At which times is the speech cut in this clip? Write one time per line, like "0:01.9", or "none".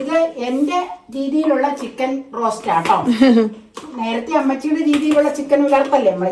none